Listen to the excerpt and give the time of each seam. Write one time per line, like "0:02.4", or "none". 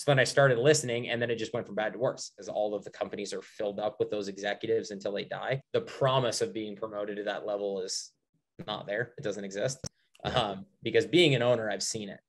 0:02.5
0:05.6